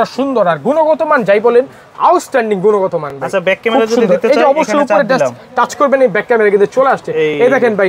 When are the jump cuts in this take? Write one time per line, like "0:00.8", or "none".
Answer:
none